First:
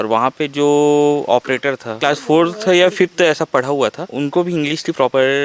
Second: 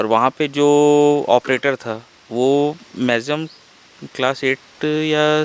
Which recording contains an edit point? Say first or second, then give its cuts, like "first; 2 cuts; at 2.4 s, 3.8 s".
first; 2 cuts; at 1.9 s, 4.1 s